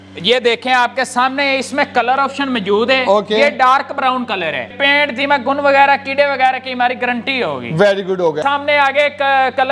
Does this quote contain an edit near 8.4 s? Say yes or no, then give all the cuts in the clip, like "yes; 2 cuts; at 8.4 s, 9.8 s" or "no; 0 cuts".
yes; 2 cuts; at 4.7 s, 8.4 s